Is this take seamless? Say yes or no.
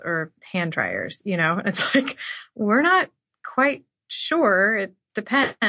yes